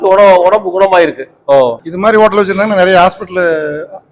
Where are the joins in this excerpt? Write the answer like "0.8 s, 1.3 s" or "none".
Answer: 1.3 s